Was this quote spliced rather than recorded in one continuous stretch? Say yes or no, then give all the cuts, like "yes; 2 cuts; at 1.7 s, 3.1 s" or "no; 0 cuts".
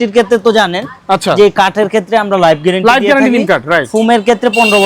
no; 0 cuts